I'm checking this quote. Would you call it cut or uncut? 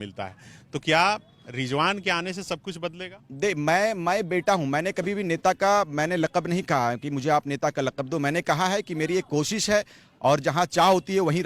uncut